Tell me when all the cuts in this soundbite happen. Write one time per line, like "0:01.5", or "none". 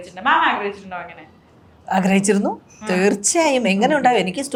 none